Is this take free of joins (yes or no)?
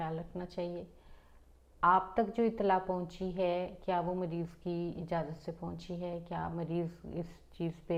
yes